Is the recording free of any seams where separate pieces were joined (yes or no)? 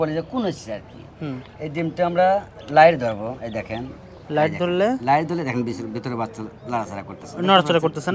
yes